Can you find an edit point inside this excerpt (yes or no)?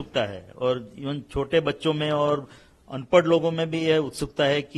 no